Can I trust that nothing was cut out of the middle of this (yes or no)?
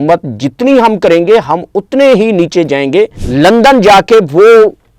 no